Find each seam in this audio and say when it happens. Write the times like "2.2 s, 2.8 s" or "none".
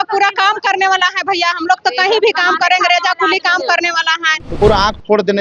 4.5 s